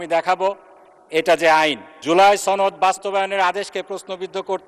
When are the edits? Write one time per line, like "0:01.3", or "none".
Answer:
0:01.9